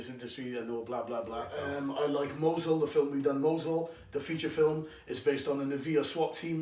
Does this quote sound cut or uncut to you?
cut